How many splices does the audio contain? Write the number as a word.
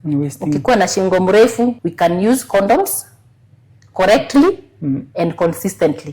one